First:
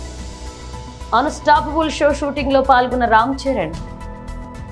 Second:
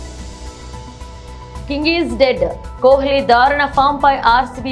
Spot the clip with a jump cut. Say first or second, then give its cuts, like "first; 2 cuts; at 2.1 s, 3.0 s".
second; 1 cut; at 0.9 s